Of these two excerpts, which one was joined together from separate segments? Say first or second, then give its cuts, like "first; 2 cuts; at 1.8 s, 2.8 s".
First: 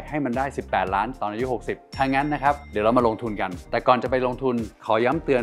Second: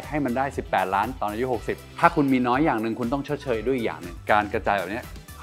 second; 2 cuts; at 1.8 s, 4.1 s